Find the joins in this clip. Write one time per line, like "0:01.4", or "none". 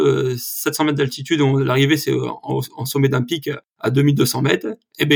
none